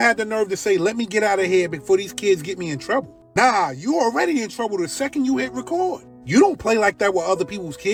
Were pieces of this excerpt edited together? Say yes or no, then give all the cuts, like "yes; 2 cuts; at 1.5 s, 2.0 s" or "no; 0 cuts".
no; 0 cuts